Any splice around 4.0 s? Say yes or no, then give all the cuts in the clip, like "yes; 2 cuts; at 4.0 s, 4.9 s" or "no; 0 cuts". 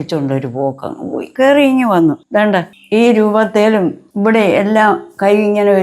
yes; 3 cuts; at 1.2 s, 2.5 s, 4.0 s